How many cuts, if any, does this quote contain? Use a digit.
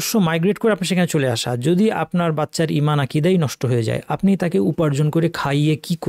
0